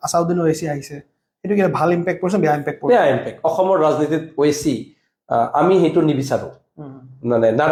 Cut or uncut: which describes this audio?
uncut